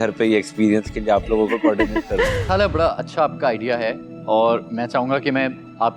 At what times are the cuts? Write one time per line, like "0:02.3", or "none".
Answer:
0:02.4